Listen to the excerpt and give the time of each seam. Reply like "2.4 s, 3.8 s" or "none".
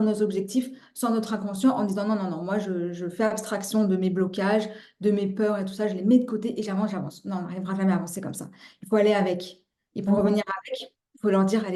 none